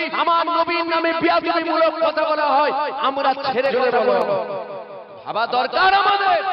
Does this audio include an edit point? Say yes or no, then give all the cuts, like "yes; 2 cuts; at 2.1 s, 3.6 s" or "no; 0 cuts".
yes; 1 cut; at 3.7 s